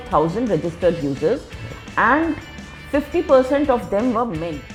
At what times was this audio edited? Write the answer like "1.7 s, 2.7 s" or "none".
none